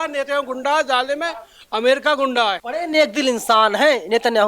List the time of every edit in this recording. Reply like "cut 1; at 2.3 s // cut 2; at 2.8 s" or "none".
cut 1; at 2.6 s